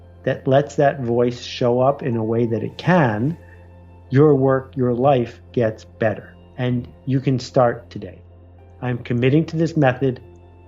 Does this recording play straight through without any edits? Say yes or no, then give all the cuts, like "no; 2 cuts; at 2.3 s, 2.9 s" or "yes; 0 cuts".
no; 1 cut; at 8.3 s